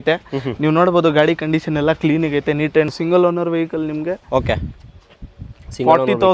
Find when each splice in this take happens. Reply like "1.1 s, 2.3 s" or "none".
2.9 s

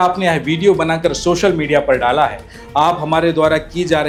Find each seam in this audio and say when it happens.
none

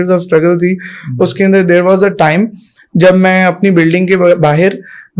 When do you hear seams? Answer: none

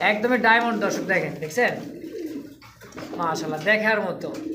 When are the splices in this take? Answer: none

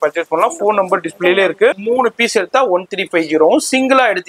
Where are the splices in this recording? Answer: 1.8 s

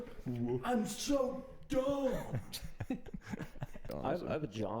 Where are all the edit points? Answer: 3.9 s

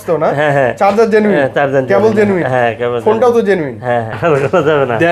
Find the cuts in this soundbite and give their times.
4.1 s

